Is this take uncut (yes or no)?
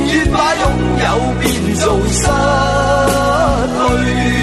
yes